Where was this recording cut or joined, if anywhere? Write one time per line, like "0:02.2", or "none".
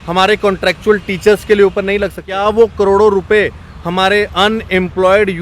0:02.3